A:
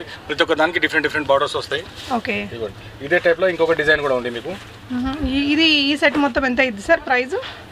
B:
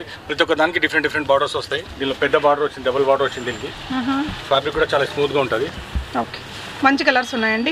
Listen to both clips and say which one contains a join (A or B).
B